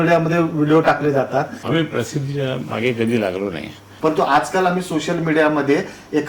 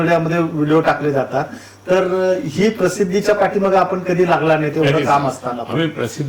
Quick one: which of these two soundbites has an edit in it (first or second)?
first